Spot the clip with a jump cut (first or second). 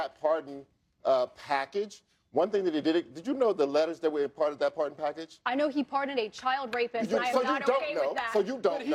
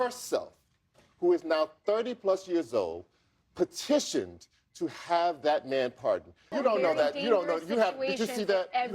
second